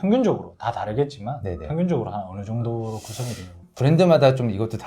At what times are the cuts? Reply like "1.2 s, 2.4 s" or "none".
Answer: 3.6 s